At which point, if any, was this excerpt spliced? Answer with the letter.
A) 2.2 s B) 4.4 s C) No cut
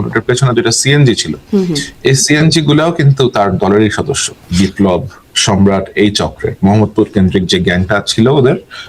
B